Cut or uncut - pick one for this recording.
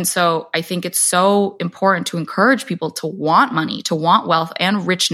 uncut